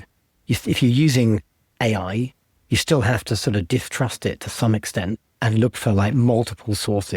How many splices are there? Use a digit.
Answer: 1